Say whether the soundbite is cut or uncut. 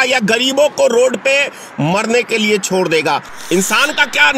cut